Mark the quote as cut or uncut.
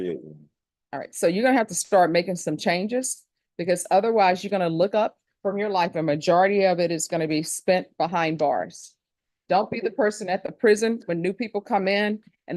uncut